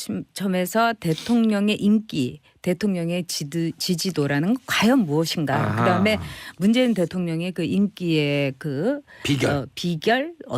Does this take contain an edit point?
no; 0 cuts

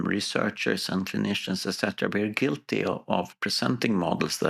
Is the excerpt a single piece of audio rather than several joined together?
yes; 0 cuts

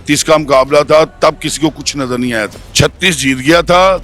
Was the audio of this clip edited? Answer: yes; 1 cut; at 2.6 s

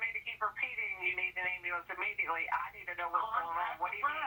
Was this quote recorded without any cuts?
yes; 0 cuts

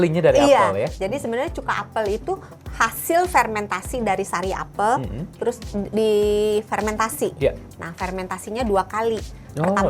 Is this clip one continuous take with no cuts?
no; 1 cut; at 5.3 s

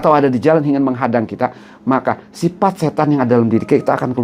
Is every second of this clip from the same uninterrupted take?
yes; 0 cuts

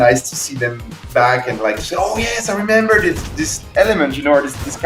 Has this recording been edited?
no; 0 cuts

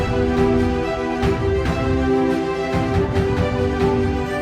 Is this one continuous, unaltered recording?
yes; 0 cuts

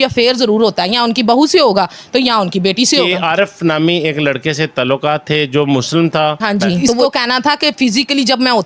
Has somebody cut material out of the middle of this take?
yes; 2 cuts; at 3.0 s, 7.0 s

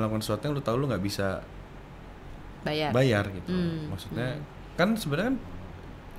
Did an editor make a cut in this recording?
no; 0 cuts

